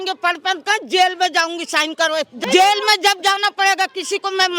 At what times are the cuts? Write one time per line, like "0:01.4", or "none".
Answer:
0:02.3

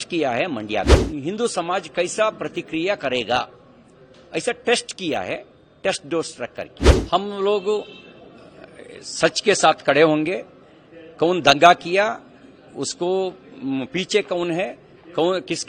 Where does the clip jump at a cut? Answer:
0:01.0
0:06.9

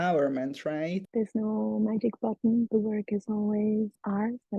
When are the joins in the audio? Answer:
0:01.0
0:02.7

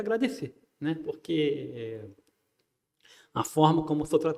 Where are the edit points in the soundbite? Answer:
none

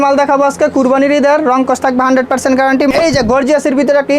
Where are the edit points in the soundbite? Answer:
0:02.9

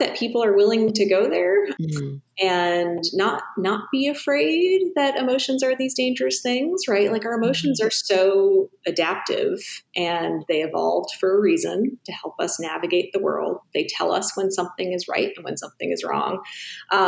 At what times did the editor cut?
0:01.7

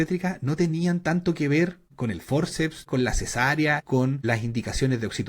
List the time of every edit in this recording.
0:01.9
0:02.8
0:03.9

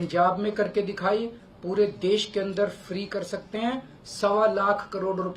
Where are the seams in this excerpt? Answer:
none

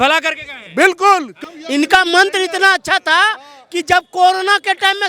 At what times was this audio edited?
0:01.3

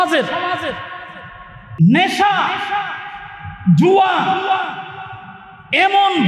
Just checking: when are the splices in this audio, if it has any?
0:01.6

